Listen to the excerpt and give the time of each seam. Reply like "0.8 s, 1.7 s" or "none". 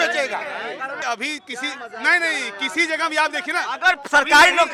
1.0 s

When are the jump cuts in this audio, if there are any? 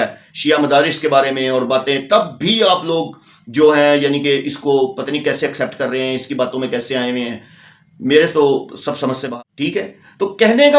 9.3 s

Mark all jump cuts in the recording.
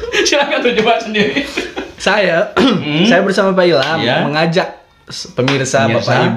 none

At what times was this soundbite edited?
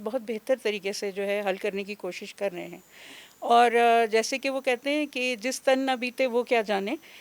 none

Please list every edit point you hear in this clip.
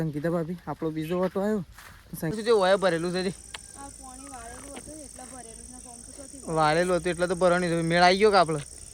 2.4 s

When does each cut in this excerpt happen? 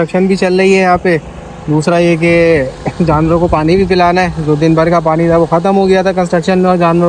none

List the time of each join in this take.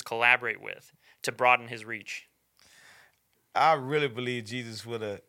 3.3 s

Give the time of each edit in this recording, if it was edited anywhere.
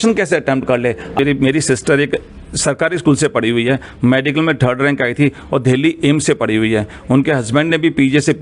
1.2 s

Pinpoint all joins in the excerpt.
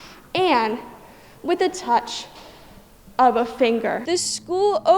4.0 s

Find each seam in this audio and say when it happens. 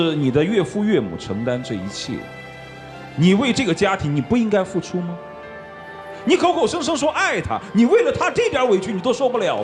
none

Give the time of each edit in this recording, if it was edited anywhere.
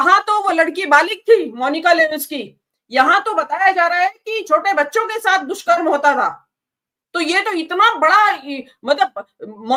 none

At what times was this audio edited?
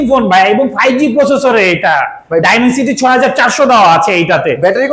none

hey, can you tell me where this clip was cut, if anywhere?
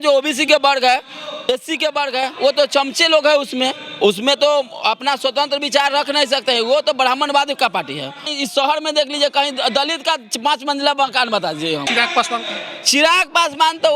8.3 s, 11.9 s

